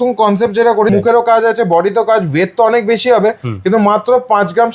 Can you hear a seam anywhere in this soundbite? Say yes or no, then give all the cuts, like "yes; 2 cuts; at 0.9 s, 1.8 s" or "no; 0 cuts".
yes; 1 cut; at 0.9 s